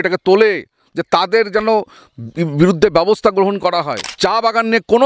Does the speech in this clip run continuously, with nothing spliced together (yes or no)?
no